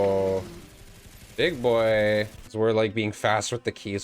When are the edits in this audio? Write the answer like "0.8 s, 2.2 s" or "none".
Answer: 2.4 s